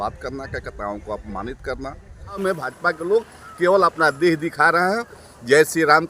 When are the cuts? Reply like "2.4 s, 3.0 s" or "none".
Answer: 2.4 s